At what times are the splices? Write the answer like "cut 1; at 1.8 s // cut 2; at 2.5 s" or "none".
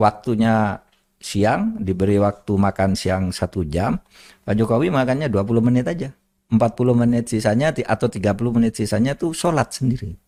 none